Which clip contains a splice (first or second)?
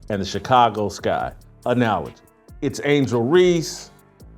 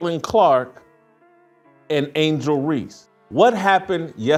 first